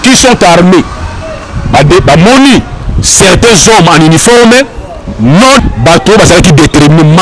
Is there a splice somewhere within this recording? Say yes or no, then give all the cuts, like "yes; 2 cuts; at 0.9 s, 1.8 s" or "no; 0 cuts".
yes; 1 cut; at 5.6 s